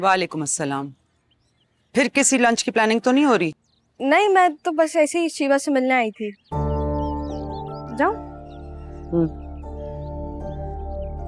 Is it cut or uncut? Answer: uncut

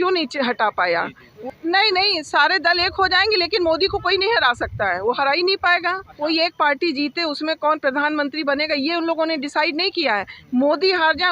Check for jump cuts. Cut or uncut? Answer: cut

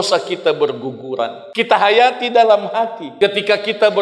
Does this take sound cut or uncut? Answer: cut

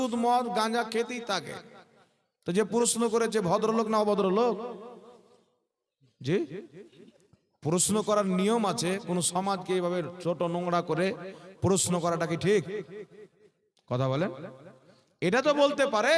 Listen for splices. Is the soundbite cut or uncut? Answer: uncut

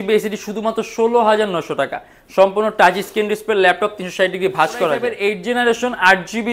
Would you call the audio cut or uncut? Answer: cut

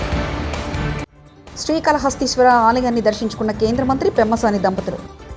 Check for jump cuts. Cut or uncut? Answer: cut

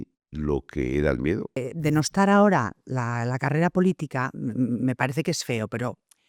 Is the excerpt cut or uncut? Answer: cut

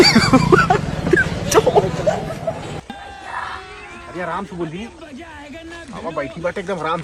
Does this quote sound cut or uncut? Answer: uncut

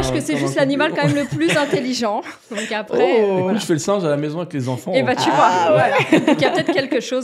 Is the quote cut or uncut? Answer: uncut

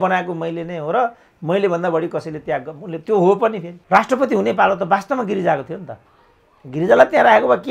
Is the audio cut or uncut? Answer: cut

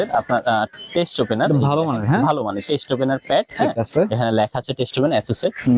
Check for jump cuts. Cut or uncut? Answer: uncut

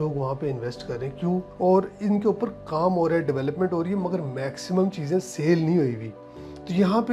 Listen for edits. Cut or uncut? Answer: cut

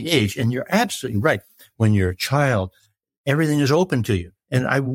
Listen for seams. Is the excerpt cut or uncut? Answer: cut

